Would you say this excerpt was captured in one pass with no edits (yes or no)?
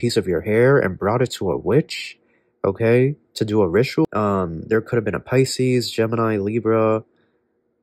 no